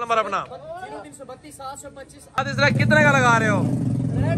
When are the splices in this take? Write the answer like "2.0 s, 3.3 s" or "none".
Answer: 2.4 s